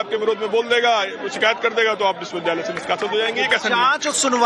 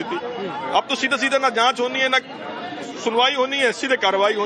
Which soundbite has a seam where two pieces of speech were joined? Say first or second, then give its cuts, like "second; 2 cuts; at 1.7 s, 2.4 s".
second; 1 cut; at 2.8 s